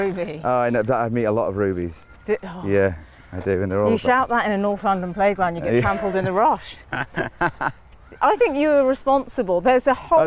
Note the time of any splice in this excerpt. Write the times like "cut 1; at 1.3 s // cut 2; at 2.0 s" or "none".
none

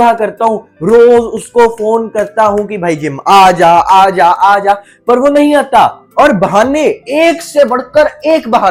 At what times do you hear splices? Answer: none

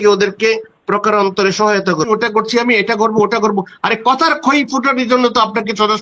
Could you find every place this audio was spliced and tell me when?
cut 1; at 2.1 s

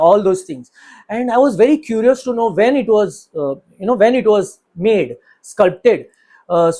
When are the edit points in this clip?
none

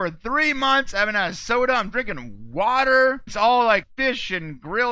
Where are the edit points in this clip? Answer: cut 1; at 3.3 s // cut 2; at 3.9 s

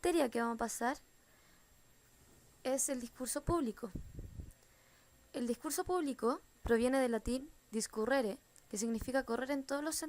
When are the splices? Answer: cut 1; at 7.6 s

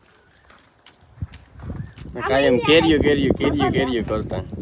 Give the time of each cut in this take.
none

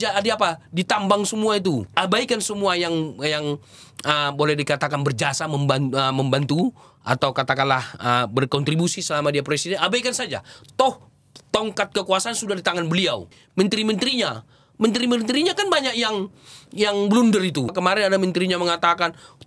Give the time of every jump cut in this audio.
cut 1; at 1.9 s // cut 2; at 13.3 s // cut 3; at 17.7 s

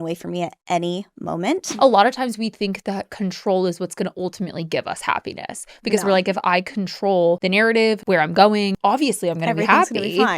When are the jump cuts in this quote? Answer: cut 1; at 1.7 s // cut 2; at 7.4 s // cut 3; at 8.7 s

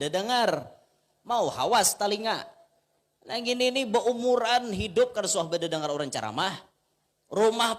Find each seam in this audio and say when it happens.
none

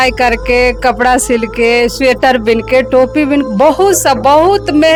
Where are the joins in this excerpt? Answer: none

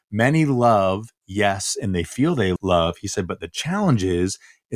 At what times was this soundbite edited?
cut 1; at 2.6 s

